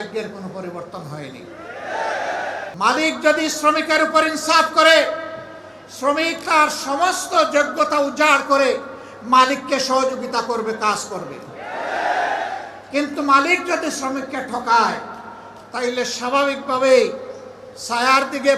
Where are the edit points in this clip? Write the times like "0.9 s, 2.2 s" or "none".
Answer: 2.7 s